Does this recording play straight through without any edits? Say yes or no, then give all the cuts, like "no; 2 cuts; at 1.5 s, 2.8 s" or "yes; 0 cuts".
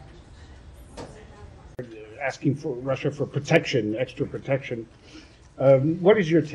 no; 1 cut; at 1.8 s